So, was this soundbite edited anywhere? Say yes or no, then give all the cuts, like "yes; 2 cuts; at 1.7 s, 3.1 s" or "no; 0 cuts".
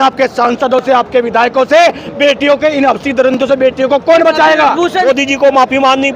yes; 1 cut; at 5.0 s